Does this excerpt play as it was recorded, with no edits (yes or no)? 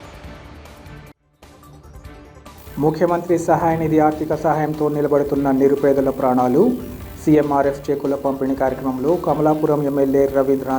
yes